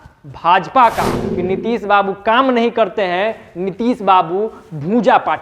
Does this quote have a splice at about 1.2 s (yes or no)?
yes